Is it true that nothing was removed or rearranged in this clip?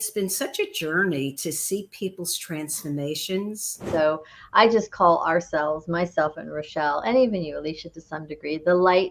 no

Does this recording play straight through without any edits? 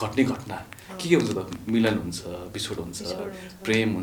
yes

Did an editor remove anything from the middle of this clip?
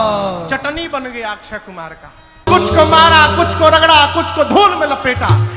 yes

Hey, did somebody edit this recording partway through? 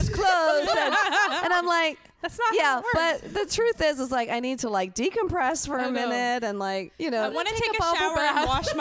no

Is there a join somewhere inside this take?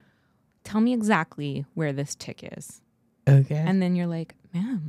no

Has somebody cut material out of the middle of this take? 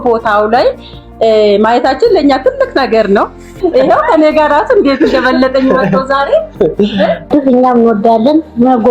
yes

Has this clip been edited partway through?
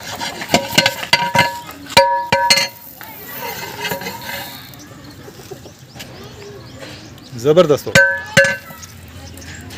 no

